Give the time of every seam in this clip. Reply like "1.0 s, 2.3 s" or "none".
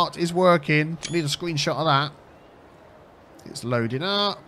none